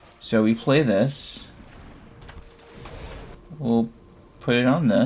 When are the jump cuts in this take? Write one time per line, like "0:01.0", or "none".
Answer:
0:03.4